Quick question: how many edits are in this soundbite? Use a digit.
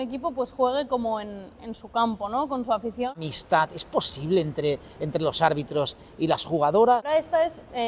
2